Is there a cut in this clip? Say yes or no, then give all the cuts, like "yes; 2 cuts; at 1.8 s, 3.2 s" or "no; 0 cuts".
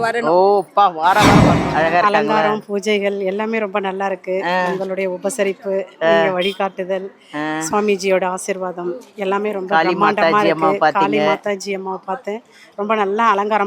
yes; 1 cut; at 1.6 s